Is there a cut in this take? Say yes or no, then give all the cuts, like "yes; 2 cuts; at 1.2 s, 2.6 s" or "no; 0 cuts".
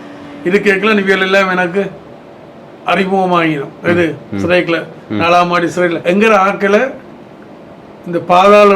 yes; 1 cut; at 6.0 s